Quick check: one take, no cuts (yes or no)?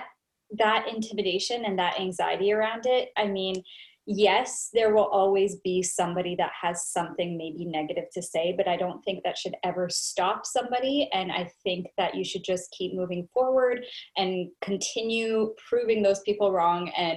yes